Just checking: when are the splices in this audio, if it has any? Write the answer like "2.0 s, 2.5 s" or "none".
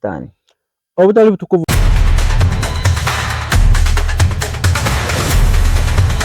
1.6 s